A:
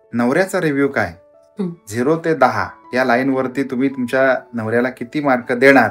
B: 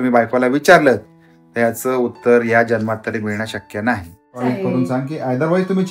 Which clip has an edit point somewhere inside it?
B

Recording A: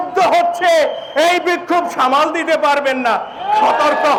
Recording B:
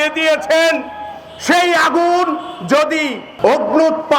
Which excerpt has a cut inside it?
B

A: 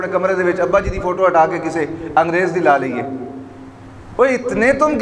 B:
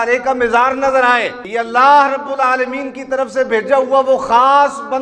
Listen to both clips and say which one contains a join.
B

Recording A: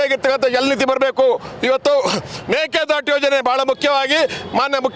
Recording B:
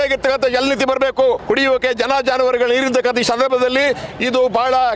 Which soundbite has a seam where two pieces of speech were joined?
B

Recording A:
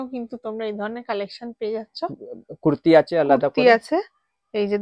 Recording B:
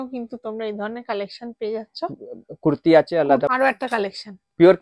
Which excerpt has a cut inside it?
B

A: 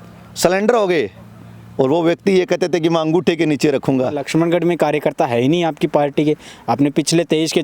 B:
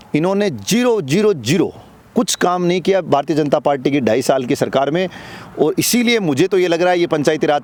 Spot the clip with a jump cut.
A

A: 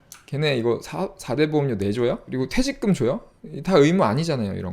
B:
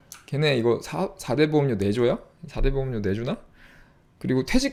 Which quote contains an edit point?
A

